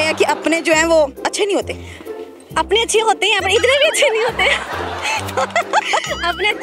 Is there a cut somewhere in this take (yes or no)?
no